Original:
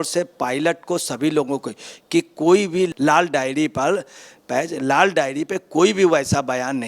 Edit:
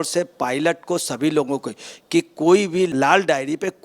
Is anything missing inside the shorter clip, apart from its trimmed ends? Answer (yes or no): yes